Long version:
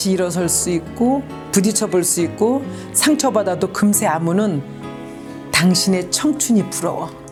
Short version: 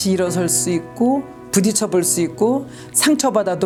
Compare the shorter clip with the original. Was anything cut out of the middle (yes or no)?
no